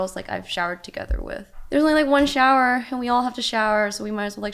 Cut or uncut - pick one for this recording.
cut